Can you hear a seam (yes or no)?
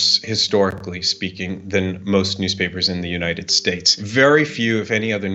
yes